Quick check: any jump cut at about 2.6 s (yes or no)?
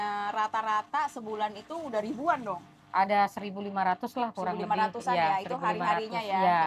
no